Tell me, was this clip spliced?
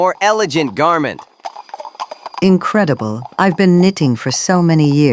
yes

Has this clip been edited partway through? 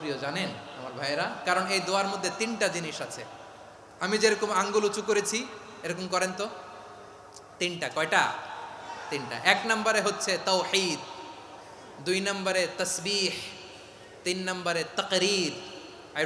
no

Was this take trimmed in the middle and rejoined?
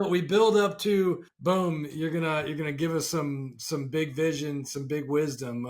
yes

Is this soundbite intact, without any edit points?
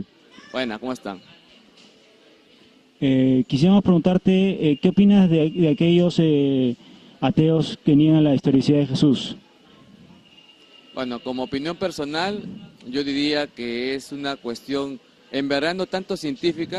yes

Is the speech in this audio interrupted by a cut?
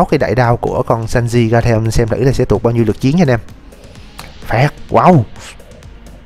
no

